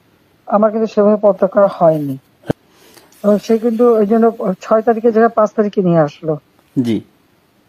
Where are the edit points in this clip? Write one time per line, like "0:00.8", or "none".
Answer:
0:02.5